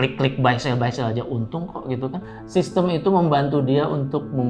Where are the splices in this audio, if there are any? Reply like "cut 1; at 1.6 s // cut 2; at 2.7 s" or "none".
cut 1; at 2.2 s